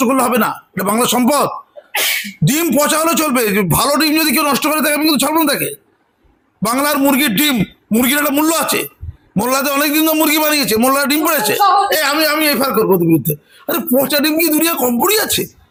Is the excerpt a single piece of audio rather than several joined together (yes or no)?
yes